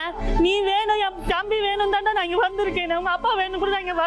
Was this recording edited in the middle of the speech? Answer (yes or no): no